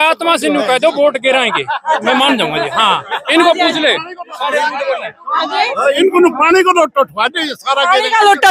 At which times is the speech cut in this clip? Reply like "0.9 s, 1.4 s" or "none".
none